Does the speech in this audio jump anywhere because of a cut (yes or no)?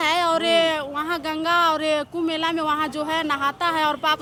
no